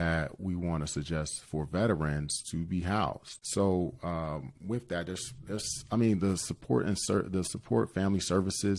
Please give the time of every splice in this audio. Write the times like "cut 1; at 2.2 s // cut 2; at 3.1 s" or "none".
cut 1; at 3.3 s